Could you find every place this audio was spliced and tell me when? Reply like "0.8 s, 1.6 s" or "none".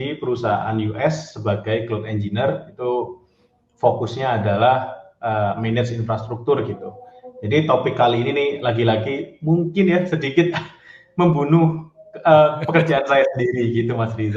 none